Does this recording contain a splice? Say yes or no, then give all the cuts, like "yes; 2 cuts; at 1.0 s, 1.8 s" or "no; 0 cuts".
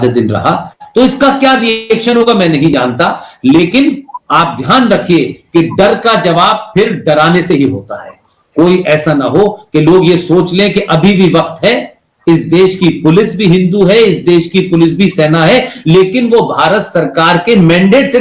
no; 0 cuts